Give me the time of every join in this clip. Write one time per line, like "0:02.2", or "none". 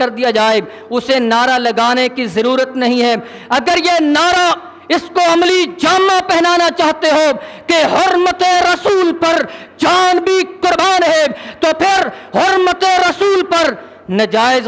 none